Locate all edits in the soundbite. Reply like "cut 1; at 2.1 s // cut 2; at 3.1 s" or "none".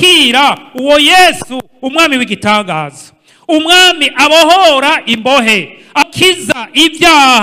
cut 1; at 6.0 s